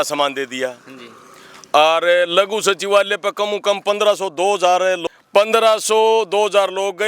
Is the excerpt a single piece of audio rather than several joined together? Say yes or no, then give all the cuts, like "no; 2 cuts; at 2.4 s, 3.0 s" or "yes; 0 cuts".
no; 1 cut; at 5.0 s